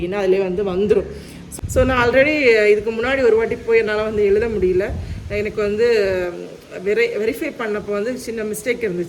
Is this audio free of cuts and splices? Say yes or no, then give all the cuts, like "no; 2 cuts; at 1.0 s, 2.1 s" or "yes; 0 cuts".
no; 1 cut; at 1.5 s